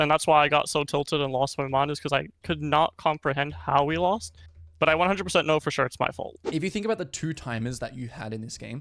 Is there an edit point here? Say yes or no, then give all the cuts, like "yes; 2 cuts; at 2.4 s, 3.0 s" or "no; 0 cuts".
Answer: yes; 1 cut; at 6.4 s